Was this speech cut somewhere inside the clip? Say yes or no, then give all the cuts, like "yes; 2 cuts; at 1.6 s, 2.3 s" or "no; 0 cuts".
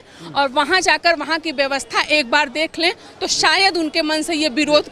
no; 0 cuts